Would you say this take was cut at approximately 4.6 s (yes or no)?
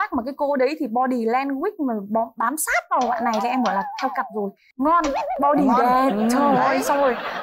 yes